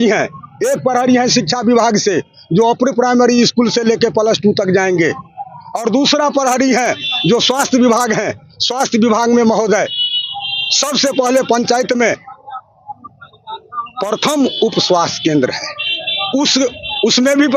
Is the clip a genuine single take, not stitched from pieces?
yes; 0 cuts

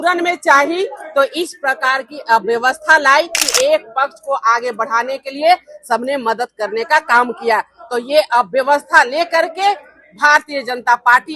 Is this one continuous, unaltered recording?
no; 1 cut; at 3.4 s

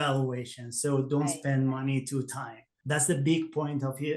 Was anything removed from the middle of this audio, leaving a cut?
yes; 1 cut; at 2.8 s

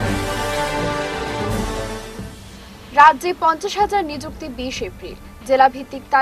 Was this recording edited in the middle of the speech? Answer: no; 0 cuts

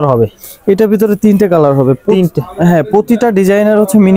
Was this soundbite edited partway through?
no; 0 cuts

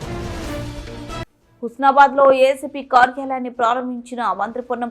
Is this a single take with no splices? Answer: no; 1 cut; at 1.2 s

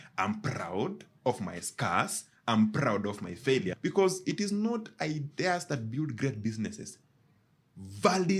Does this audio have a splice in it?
yes; 1 cut; at 3.7 s

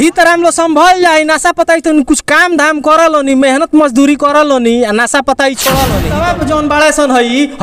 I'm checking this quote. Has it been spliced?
yes; 1 cut; at 6.1 s

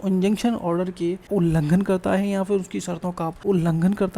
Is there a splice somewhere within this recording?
yes; 2 cuts; at 1.2 s, 3.3 s

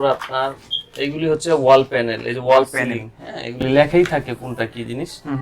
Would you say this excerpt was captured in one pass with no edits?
yes; 0 cuts

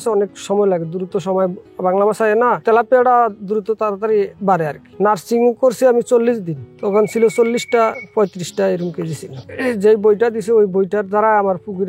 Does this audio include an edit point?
yes; 2 cuts; at 4.8 s, 9.5 s

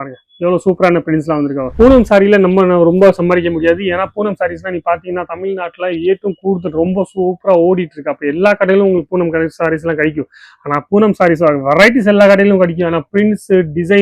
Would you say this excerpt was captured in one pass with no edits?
no; 1 cut; at 1.6 s

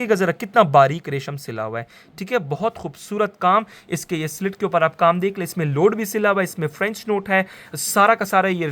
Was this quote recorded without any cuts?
yes; 0 cuts

